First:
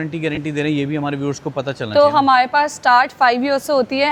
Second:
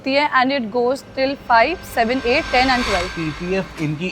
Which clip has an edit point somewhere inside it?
second; 1 cut; at 3.1 s

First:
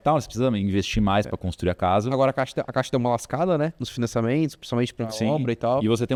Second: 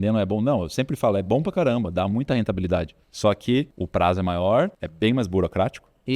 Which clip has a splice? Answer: second; 3 cuts; at 3.0 s, 3.8 s, 4.8 s

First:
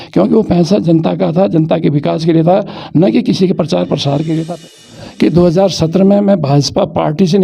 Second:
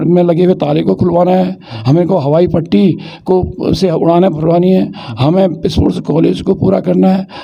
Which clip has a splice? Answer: first; 1 cut; at 4.6 s

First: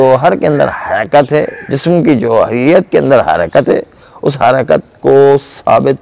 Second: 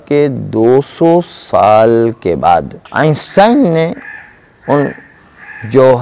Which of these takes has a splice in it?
second; 1 cut; at 2.8 s

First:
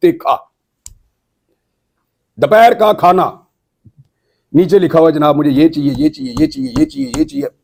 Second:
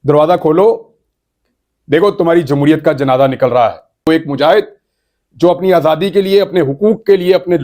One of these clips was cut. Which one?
second; 1 cut; at 4.1 s

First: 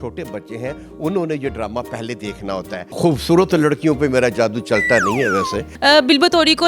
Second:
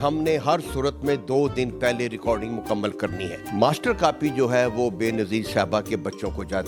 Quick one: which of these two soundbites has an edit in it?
first; 2 cuts; at 2.9 s, 5.6 s

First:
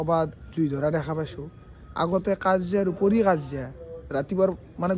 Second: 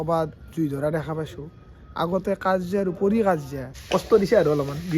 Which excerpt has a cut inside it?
second; 1 cut; at 3.7 s

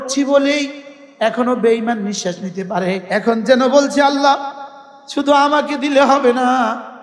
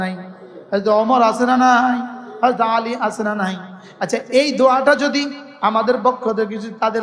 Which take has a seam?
first; 1 cut; at 3.0 s

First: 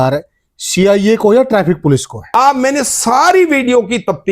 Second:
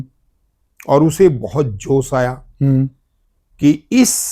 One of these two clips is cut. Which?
first; 1 cut; at 2.3 s

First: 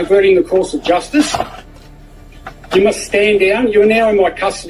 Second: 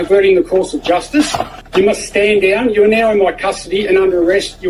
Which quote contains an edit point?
second; 1 cut; at 1.6 s

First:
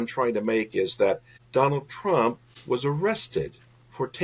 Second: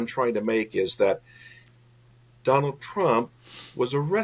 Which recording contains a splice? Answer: first; 2 cuts; at 1.3 s, 2.5 s

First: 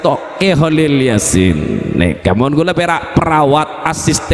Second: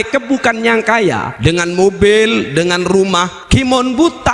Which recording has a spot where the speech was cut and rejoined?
second; 2 cuts; at 1.3 s, 3.3 s

